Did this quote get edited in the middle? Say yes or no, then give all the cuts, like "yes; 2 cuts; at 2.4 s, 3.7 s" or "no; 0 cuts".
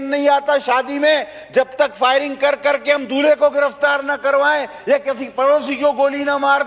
no; 0 cuts